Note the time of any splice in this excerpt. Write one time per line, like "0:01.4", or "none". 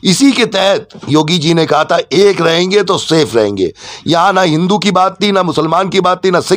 none